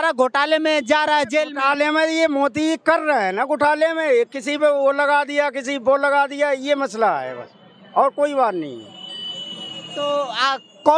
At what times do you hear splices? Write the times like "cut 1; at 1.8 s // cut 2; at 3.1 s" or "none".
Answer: none